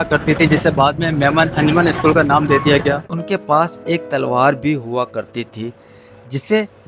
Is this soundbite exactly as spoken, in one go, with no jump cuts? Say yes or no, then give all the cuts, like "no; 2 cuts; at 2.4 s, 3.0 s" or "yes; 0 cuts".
no; 1 cut; at 3.1 s